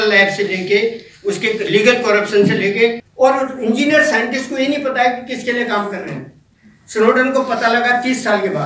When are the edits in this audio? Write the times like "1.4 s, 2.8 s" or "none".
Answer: 3.0 s